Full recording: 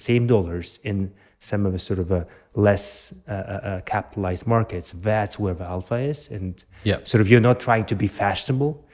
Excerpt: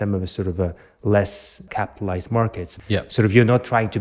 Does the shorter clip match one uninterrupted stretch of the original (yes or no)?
no